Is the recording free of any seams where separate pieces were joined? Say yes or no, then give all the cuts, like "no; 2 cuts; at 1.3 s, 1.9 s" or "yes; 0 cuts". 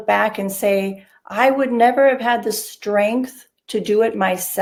yes; 0 cuts